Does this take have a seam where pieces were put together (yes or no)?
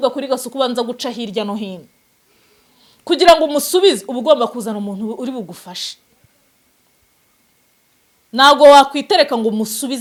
no